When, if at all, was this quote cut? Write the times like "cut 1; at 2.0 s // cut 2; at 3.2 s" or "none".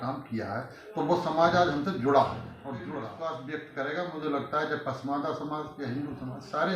cut 1; at 2.5 s